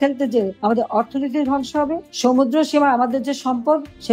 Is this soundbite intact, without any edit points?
yes; 0 cuts

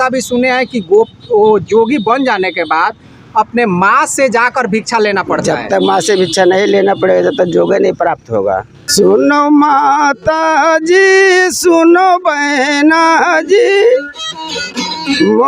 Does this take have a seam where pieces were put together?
yes; 1 cut; at 8.8 s

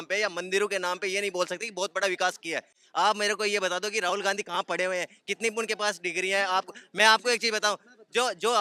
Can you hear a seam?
no; 0 cuts

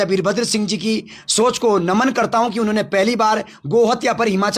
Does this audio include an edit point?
no; 0 cuts

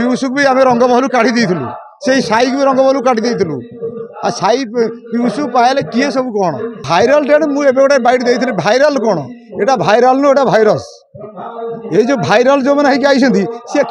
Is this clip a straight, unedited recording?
no; 1 cut; at 6.8 s

